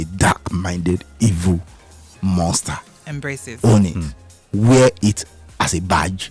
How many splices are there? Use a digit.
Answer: 0